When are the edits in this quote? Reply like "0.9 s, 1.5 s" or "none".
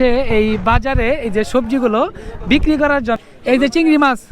3.2 s